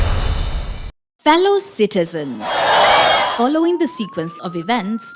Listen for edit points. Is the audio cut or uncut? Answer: cut